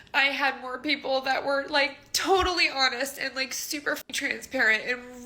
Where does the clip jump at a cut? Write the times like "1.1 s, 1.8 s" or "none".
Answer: 4.1 s